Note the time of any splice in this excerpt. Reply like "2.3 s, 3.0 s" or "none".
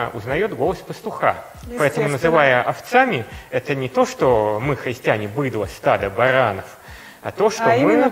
none

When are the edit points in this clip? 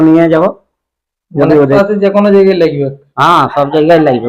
1.8 s

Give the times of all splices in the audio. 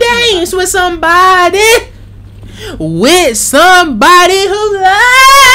none

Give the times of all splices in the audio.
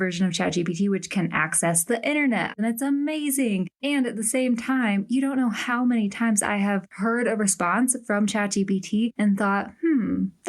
2.6 s, 3.7 s

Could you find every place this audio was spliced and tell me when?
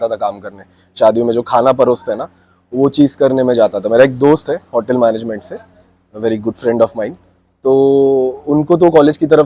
none

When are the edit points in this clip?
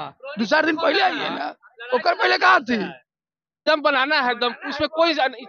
3.5 s

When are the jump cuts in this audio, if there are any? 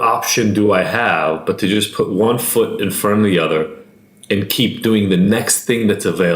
3.8 s

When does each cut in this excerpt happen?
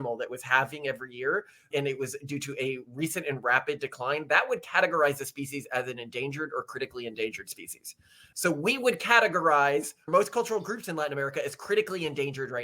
10.1 s

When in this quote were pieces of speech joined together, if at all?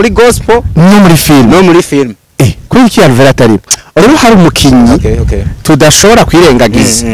4.0 s

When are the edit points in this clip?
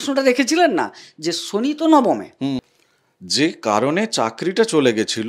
2.6 s

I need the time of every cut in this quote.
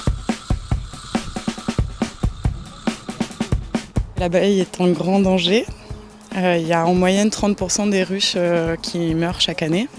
4.9 s

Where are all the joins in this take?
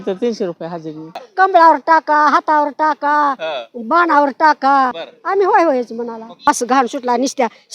1.2 s, 5.1 s, 6.5 s

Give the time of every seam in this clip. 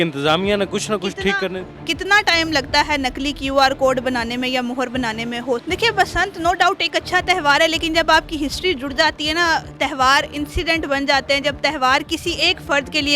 5.6 s

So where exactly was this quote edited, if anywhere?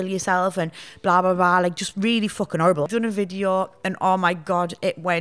2.9 s

